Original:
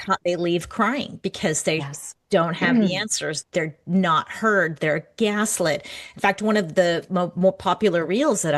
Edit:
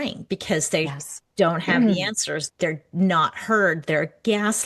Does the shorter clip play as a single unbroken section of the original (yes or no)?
yes